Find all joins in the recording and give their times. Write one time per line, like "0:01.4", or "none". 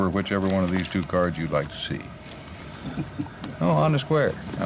0:02.7